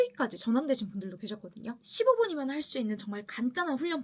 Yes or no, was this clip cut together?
no